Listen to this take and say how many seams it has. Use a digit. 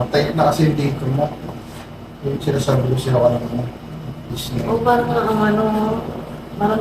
1